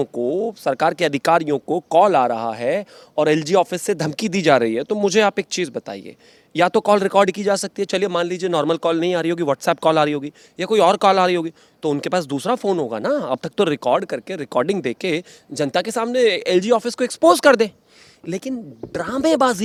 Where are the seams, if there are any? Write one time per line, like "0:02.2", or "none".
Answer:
none